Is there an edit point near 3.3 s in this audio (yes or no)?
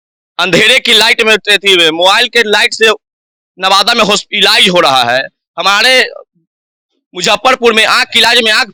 no